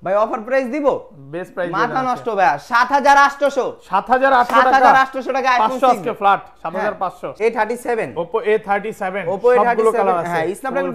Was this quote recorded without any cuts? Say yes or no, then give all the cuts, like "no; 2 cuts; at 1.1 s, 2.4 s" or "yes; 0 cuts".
no; 1 cut; at 7.2 s